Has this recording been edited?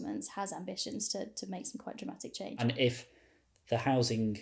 yes; 1 cut; at 2.6 s

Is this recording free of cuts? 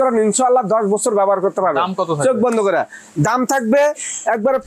yes; 0 cuts

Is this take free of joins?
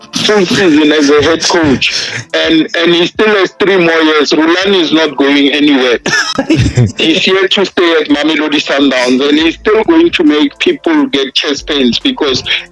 yes; 0 cuts

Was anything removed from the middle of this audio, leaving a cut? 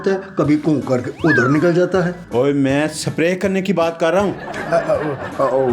no; 0 cuts

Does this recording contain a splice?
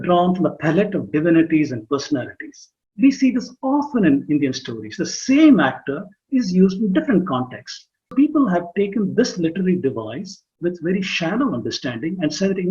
yes; 1 cut; at 8.1 s

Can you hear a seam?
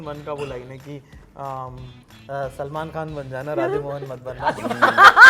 no; 0 cuts

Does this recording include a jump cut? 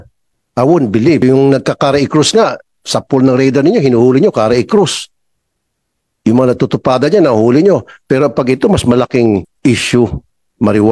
yes; 2 cuts; at 1.2 s, 9.5 s

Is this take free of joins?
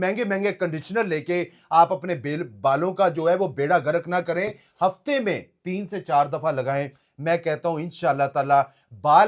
no; 1 cut; at 4.6 s

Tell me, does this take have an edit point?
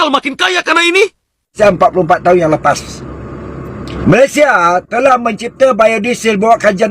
yes; 2 cuts; at 1.6 s, 3.9 s

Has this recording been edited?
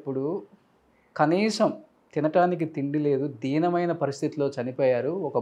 no; 0 cuts

